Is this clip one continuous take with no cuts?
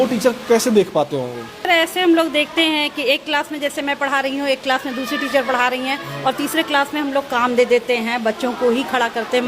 no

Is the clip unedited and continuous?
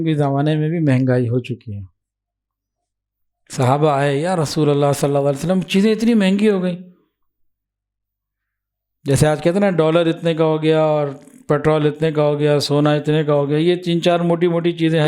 yes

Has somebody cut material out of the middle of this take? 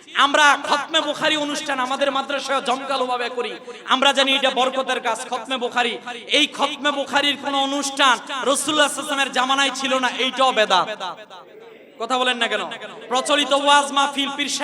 no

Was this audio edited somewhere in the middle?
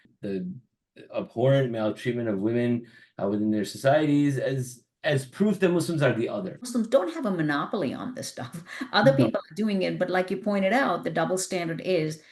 yes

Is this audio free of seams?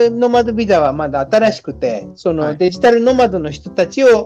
yes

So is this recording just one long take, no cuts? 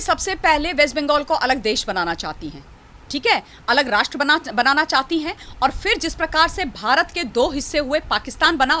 yes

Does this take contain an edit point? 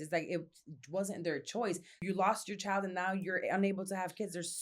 yes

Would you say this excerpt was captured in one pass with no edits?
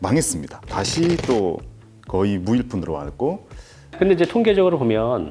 no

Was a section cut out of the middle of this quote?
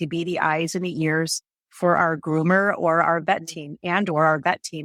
no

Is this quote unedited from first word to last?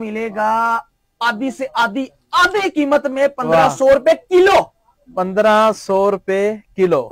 yes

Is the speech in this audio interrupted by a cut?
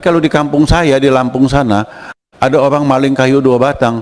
no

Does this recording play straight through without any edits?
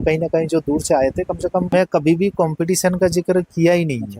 no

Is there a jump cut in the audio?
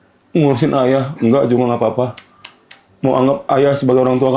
no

